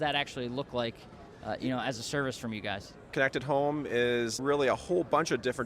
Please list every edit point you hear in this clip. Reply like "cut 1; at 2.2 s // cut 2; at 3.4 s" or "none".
cut 1; at 3.1 s // cut 2; at 4.4 s